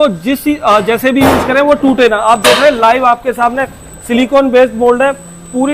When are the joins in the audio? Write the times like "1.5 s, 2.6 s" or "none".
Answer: none